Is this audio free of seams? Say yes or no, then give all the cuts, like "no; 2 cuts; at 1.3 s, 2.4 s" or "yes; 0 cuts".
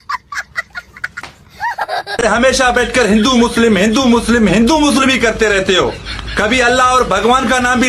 yes; 0 cuts